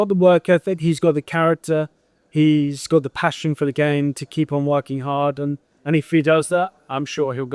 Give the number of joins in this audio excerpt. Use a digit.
0